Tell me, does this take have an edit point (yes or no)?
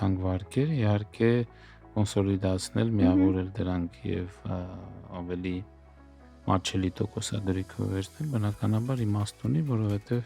no